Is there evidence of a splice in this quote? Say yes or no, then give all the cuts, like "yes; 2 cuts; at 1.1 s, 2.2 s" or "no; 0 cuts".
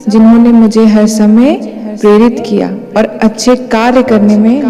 no; 0 cuts